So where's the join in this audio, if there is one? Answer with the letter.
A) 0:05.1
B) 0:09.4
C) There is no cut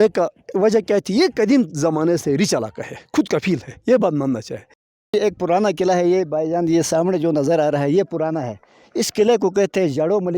A